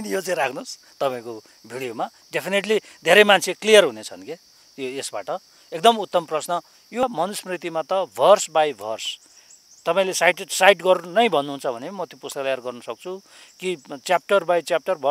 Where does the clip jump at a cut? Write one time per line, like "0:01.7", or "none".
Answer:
0:07.0